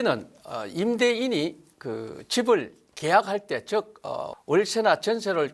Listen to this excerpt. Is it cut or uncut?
cut